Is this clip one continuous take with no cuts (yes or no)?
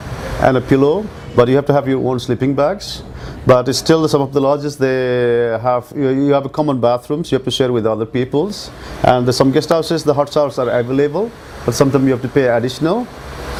yes